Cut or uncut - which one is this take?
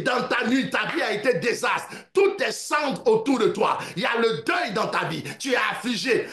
uncut